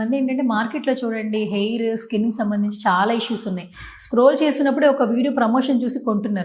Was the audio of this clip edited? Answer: no; 0 cuts

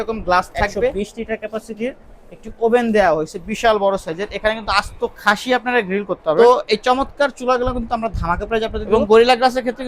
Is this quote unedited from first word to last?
no; 3 cuts; at 0.9 s, 6.4 s, 8.8 s

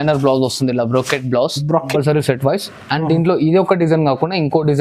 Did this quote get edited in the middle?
yes; 1 cut; at 1.9 s

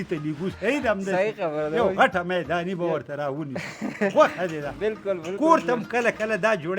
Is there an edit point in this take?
no; 0 cuts

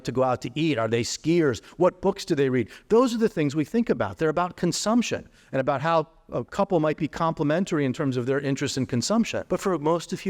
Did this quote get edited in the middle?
yes; 1 cut; at 9.4 s

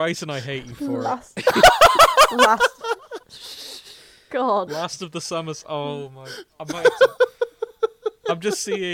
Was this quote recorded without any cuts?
yes; 0 cuts

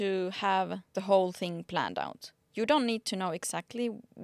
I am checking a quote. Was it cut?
yes; 1 cut; at 1.0 s

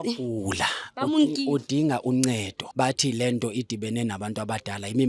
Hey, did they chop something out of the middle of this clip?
yes; 1 cut; at 2.6 s

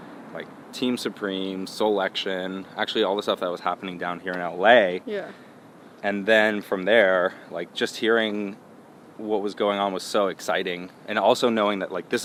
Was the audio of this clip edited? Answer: no; 0 cuts

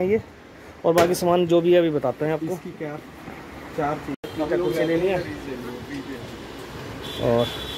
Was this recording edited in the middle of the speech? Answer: yes; 1 cut; at 4.3 s

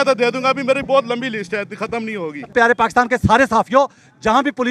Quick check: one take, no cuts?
no; 1 cut; at 2.5 s

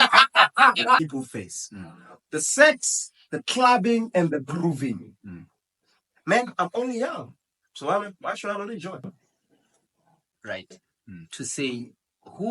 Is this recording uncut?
no; 2 cuts; at 1.0 s, 10.3 s

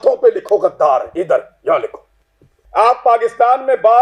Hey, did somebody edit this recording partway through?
yes; 1 cut; at 2.6 s

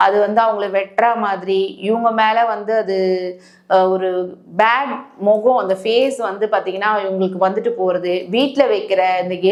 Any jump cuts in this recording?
no; 0 cuts

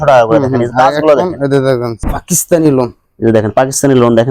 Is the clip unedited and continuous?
no; 1 cut; at 2.0 s

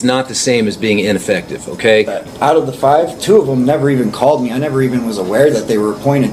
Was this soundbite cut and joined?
yes; 1 cut; at 2.2 s

